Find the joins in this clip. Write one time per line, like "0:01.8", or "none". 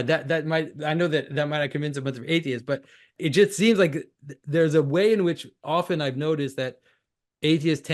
0:03.1